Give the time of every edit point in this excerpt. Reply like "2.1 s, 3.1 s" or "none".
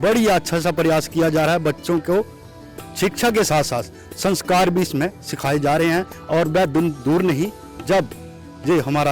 none